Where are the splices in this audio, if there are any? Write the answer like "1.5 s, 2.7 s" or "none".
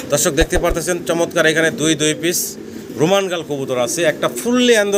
none

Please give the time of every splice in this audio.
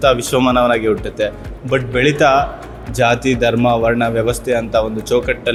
none

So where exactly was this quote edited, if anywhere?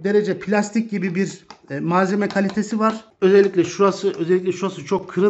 3.1 s

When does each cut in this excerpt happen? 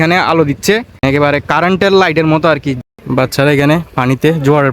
1.0 s, 2.7 s

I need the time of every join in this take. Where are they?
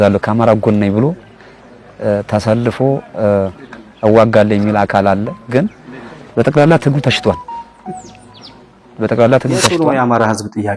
9.8 s

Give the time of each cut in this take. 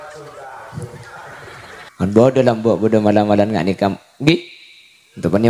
1.9 s

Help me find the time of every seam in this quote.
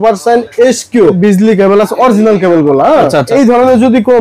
1.2 s, 3.3 s

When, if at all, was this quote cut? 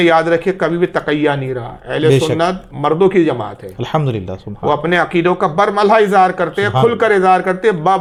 none

